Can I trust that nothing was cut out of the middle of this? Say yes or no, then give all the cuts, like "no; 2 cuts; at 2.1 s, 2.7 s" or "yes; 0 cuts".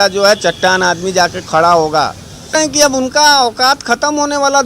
no; 1 cut; at 2.5 s